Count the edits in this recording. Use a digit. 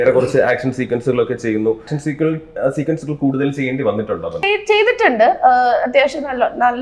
2